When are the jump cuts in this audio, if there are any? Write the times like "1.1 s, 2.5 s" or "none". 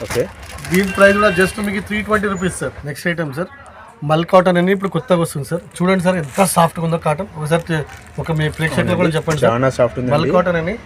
2.9 s